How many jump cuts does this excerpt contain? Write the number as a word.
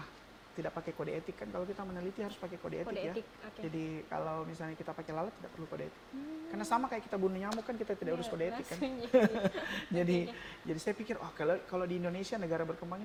zero